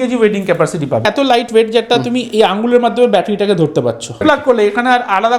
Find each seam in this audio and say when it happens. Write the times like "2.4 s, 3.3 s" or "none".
1.1 s, 4.2 s